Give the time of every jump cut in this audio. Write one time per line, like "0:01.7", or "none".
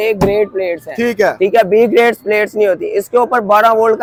none

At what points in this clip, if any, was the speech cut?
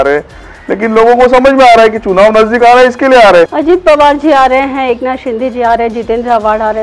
0:03.6

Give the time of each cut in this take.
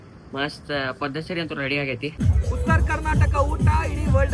0:02.1

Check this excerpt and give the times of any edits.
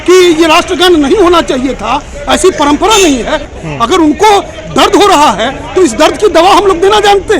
0:03.5

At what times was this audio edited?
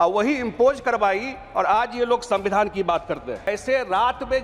0:03.5

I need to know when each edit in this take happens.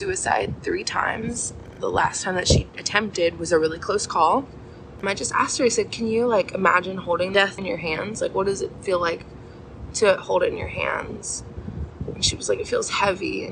0:01.7
0:05.0
0:07.4

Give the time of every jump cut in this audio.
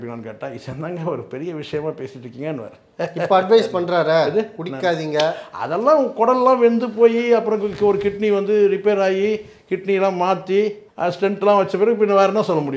0:10.8

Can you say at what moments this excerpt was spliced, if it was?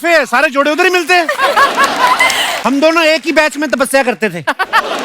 0:02.5

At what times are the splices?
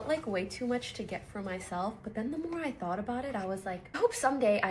none

